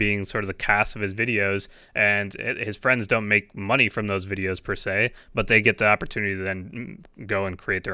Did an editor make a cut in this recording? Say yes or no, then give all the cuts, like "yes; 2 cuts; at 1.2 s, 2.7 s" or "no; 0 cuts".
no; 0 cuts